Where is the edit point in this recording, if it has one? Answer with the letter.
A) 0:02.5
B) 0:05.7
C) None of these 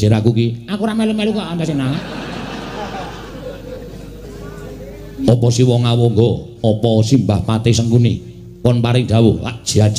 A